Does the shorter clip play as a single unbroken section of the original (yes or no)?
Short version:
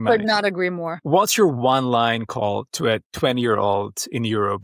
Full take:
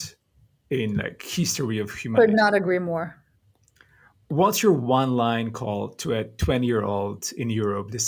no